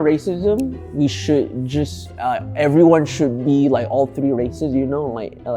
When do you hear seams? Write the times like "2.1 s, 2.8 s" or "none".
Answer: none